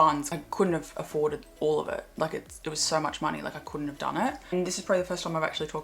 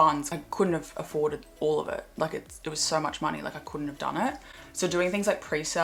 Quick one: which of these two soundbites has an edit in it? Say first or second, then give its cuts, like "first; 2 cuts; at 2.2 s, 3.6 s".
first; 1 cut; at 4.5 s